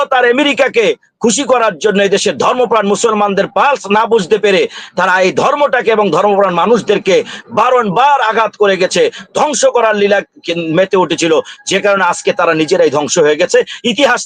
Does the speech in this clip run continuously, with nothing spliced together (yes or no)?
yes